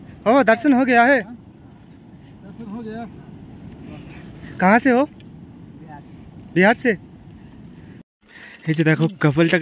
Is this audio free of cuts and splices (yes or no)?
no